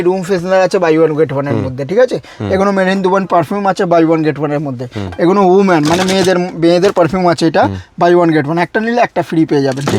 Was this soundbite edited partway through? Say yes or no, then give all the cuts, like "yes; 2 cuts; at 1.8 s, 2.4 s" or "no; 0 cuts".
no; 0 cuts